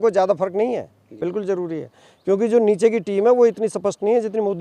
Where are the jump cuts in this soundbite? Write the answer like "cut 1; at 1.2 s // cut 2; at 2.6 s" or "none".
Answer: cut 1; at 1.1 s